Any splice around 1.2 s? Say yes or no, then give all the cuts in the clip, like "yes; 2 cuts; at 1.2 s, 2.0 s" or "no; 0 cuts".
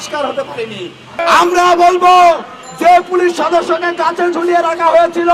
yes; 1 cut; at 1.2 s